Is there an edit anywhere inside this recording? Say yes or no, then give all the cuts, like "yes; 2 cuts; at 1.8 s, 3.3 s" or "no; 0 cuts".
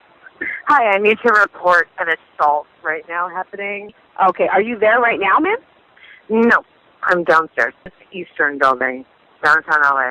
no; 0 cuts